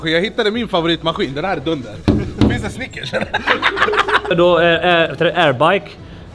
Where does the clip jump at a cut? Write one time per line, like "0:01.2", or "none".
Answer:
none

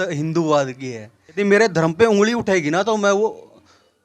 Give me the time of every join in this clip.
0:01.4

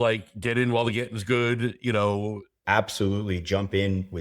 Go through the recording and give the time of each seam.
0:02.5

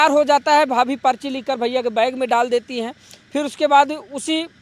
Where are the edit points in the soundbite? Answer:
none

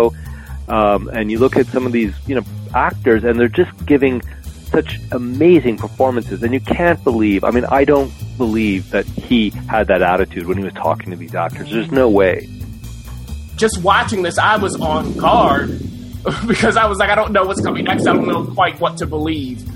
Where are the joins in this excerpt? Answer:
0:13.1

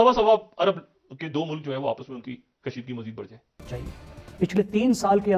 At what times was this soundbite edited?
0:03.7

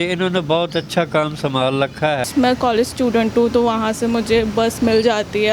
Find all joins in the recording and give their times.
0:02.3

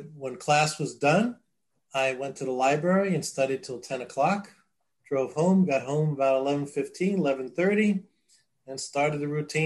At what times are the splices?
none

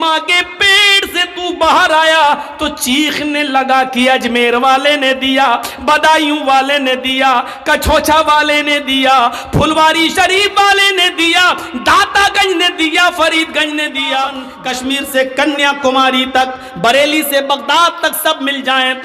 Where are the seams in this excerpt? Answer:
0:14.5

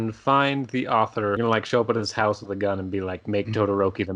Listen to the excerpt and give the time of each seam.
0:01.4

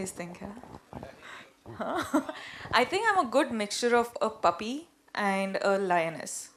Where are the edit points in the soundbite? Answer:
none

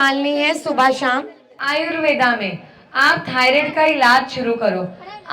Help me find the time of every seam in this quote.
0:01.6

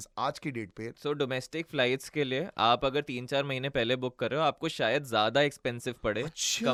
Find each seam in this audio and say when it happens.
none

